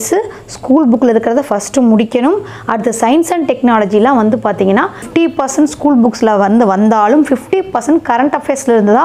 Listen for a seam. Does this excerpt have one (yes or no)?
yes